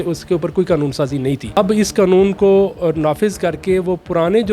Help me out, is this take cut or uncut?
cut